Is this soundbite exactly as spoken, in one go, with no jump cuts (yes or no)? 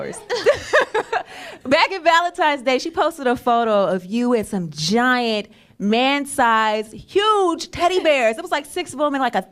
yes